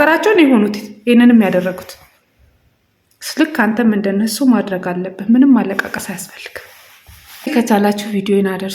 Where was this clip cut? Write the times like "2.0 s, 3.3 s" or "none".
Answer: 7.5 s